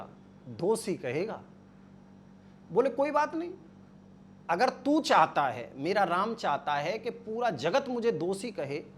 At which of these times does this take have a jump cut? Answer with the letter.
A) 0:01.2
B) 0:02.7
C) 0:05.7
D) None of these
D